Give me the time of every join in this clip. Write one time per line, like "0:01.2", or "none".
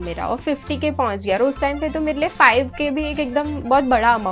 none